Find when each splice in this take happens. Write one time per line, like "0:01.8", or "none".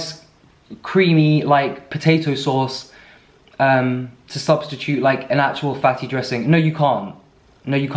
none